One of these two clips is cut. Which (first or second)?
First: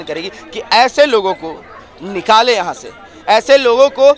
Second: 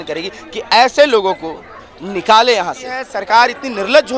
second